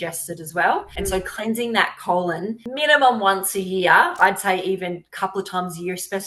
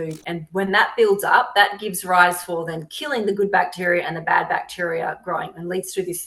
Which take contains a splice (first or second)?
first